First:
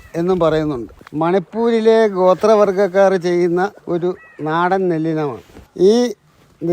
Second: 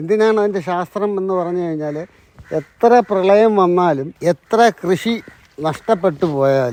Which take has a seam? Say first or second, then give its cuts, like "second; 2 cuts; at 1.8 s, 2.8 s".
first; 3 cuts; at 1.0 s, 3.8 s, 5.6 s